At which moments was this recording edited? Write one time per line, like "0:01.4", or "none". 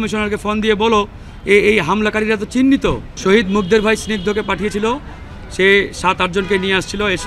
0:03.1